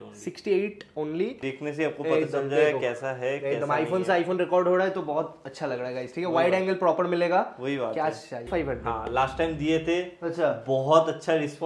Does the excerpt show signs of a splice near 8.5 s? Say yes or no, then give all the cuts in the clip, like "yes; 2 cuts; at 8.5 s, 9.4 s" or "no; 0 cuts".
yes; 2 cuts; at 1.4 s, 8.5 s